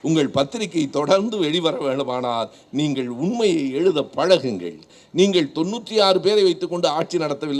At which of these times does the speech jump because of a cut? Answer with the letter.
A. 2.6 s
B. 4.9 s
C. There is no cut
B